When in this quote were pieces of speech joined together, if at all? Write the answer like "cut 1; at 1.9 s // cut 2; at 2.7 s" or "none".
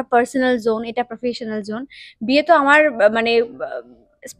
none